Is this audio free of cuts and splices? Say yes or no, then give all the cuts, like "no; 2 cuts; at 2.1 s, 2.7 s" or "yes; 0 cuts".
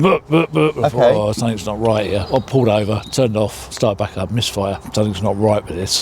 no; 2 cuts; at 3.6 s, 4.8 s